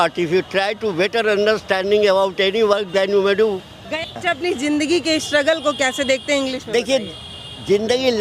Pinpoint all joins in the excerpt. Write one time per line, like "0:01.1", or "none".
0:04.1